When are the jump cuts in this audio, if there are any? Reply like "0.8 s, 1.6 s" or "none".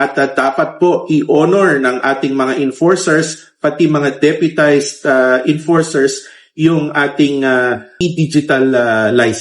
7.9 s